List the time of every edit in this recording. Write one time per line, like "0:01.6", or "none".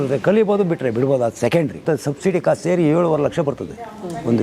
0:01.8